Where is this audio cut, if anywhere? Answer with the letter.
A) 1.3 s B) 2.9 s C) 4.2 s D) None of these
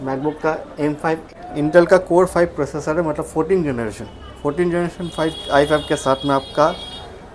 A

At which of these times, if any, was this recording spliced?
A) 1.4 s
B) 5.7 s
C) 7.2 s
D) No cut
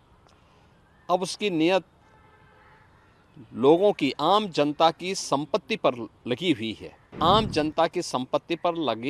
C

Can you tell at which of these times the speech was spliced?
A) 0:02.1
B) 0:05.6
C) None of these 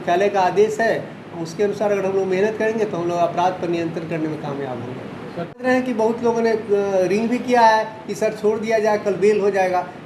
B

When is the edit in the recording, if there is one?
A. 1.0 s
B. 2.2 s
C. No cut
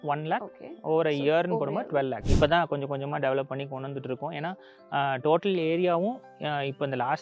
B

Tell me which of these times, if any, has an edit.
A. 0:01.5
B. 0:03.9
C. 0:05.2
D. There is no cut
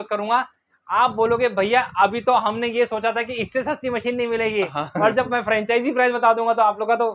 D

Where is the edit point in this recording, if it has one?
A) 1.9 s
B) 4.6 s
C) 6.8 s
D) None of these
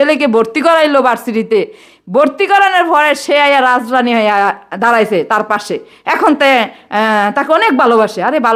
D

